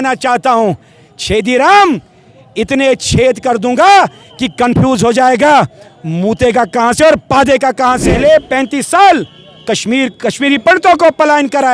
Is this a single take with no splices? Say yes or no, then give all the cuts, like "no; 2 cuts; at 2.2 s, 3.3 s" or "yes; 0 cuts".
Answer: no; 1 cut; at 8.1 s